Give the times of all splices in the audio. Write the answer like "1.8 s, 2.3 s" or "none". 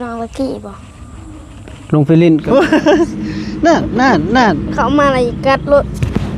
2.4 s